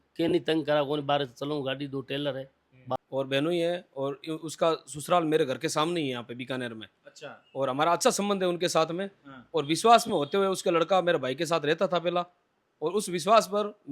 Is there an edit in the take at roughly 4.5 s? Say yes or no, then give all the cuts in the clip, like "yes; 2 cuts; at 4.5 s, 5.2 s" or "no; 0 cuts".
no; 1 cut; at 3.0 s